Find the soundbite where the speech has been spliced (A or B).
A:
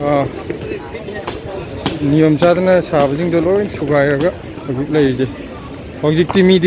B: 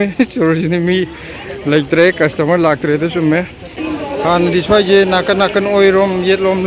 B